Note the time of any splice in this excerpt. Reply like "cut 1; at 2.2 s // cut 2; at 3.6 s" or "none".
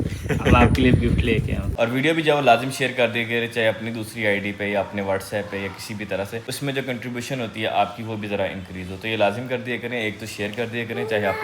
cut 1; at 1.7 s // cut 2; at 6.4 s

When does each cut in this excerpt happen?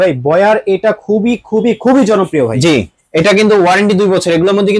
none

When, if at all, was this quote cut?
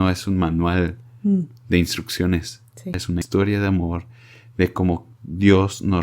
cut 1; at 3.1 s

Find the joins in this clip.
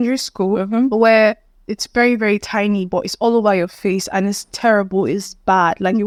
none

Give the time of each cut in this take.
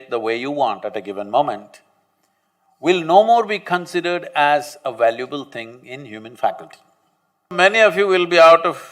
cut 1; at 7.5 s

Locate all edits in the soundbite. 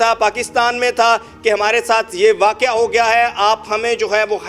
none

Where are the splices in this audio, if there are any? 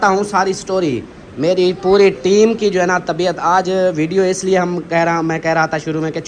none

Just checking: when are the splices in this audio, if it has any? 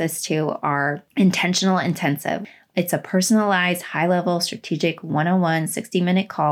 cut 1; at 1.0 s // cut 2; at 2.4 s

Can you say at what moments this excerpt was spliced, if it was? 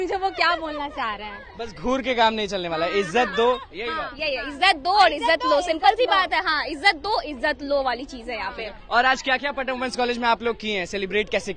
none

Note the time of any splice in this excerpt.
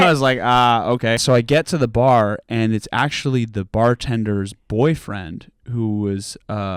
cut 1; at 1.2 s

